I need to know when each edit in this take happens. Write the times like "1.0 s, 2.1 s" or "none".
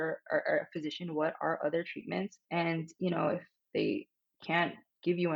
2.4 s